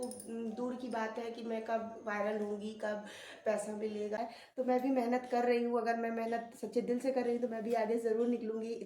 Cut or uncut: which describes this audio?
cut